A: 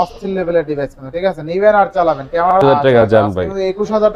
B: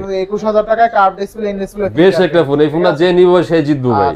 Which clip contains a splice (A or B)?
A